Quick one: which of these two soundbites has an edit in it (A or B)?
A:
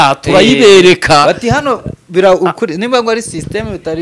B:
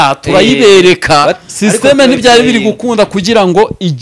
B